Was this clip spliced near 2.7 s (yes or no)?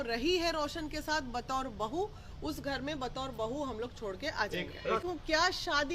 no